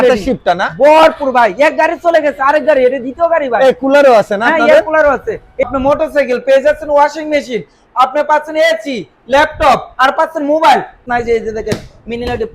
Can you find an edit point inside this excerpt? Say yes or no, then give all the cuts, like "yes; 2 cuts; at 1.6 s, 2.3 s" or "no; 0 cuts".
yes; 2 cuts; at 5.7 s, 11.0 s